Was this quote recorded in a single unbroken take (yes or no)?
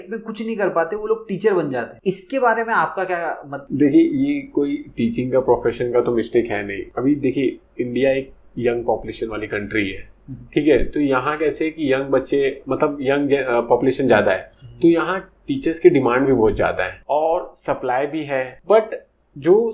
yes